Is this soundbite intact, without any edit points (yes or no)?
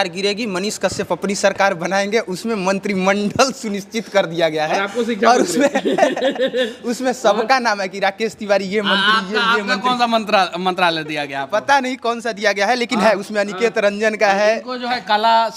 yes